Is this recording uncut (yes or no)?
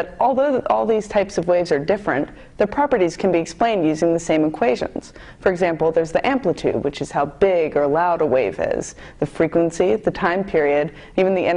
no